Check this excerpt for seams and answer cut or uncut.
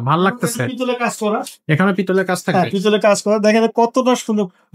uncut